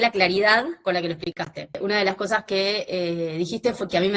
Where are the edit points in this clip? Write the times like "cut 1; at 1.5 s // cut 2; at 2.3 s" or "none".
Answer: cut 1; at 1.7 s